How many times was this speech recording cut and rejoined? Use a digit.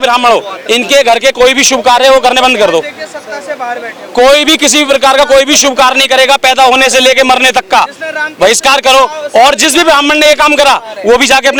0